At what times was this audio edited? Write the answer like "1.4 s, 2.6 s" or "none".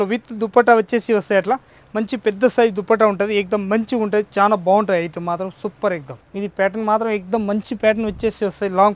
none